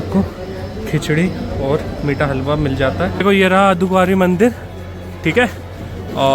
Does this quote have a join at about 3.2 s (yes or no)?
yes